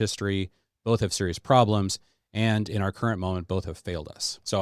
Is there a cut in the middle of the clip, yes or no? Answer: no